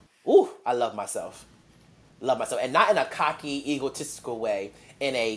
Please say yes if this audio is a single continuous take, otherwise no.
yes